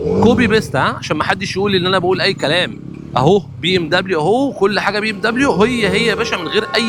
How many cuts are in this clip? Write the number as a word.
zero